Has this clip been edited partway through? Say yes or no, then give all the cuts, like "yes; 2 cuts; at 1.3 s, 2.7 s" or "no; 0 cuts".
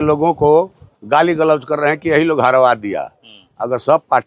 no; 0 cuts